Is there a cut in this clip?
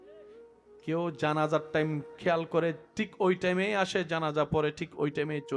no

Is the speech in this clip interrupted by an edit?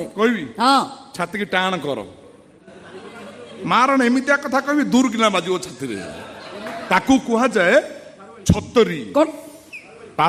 no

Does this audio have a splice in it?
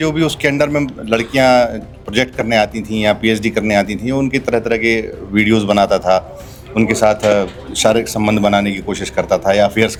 no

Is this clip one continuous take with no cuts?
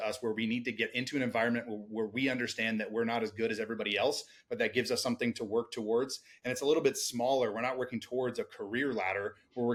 yes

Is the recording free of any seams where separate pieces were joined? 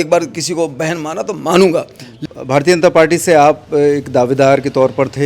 no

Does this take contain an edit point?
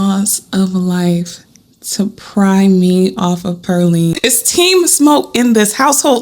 yes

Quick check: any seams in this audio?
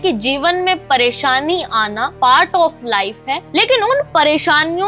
yes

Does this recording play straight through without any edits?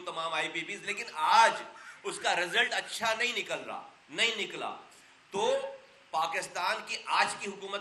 yes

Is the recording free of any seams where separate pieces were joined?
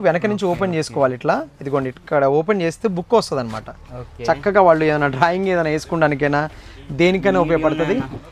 yes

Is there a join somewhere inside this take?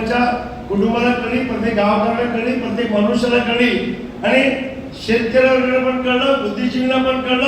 no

